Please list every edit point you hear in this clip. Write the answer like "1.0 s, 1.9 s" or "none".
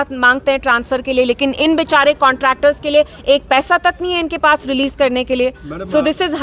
none